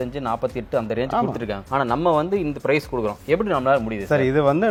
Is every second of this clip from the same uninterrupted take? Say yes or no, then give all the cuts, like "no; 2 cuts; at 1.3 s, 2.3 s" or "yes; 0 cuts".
yes; 0 cuts